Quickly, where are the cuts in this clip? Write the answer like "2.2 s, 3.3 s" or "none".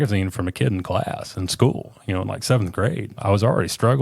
3.1 s